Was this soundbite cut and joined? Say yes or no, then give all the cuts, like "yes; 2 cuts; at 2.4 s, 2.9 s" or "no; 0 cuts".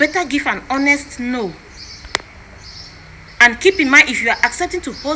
no; 0 cuts